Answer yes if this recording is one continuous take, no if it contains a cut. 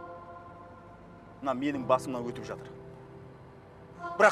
yes